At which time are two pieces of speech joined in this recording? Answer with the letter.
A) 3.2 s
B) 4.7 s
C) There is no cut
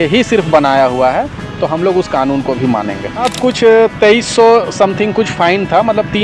A